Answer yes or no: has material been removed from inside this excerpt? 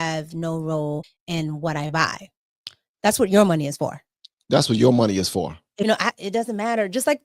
yes